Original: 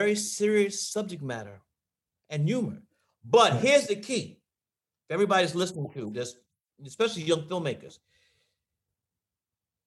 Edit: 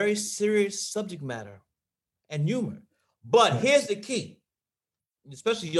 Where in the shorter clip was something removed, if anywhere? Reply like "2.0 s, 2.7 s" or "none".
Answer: 4.9 s